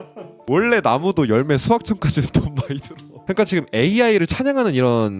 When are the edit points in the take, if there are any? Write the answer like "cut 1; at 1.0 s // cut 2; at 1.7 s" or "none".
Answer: cut 1; at 3.1 s